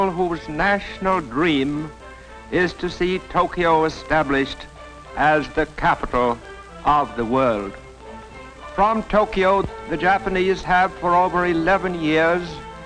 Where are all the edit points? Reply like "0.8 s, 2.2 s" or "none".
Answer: none

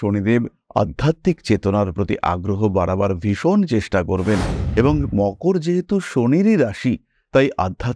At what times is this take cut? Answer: none

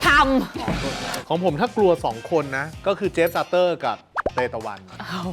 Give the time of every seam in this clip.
1.0 s, 2.6 s

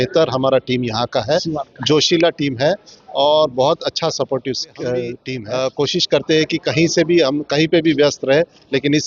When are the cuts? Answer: 5.3 s

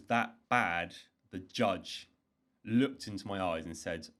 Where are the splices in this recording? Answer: none

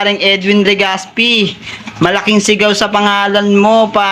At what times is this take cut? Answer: 1.5 s

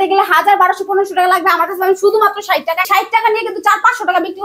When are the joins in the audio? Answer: 2.9 s

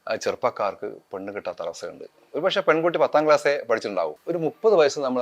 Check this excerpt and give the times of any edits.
4.2 s

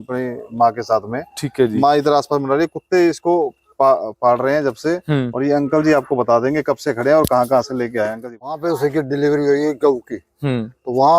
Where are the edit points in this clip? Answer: 8.6 s

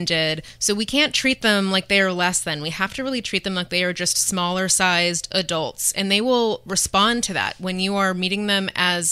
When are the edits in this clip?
none

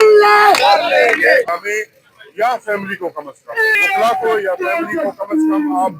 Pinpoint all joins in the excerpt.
1.5 s, 3.8 s

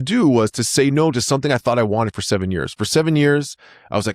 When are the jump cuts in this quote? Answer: none

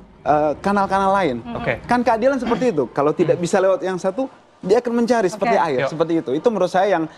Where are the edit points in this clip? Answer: none

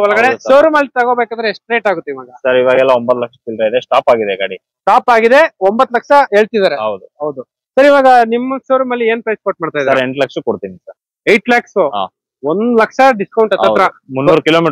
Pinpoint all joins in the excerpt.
none

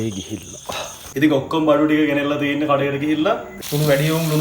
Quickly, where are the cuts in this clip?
1.0 s, 3.6 s

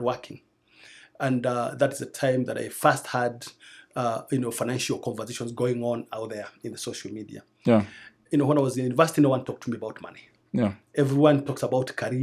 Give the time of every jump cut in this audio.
none

